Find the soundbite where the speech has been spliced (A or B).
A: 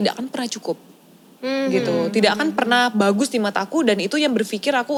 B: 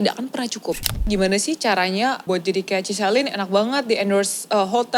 B